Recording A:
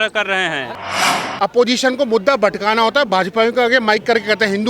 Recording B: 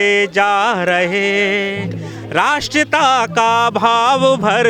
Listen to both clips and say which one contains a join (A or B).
A